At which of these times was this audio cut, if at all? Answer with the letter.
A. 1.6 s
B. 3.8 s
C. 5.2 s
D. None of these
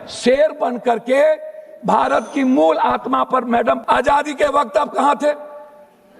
B